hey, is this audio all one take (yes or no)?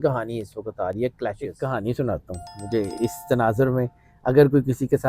no